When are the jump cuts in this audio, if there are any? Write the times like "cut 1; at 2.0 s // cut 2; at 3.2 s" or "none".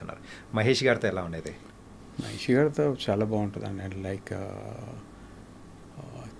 none